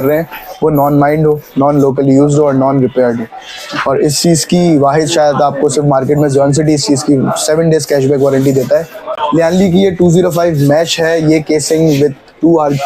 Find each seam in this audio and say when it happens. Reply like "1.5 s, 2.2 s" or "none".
9.0 s

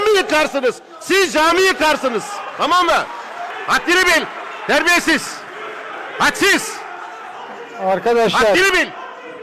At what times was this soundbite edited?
3.5 s

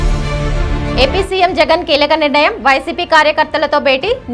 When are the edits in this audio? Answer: 0.9 s

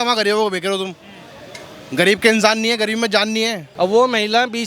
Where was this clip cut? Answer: 3.6 s

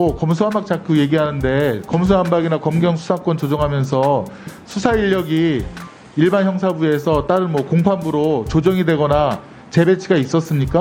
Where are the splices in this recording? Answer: none

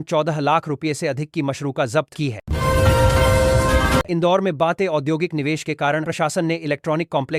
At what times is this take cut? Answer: none

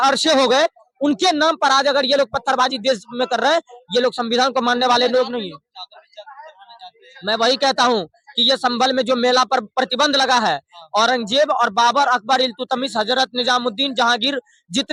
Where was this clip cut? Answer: none

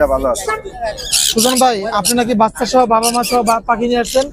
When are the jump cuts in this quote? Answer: none

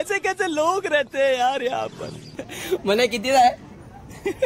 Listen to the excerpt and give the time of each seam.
2.6 s

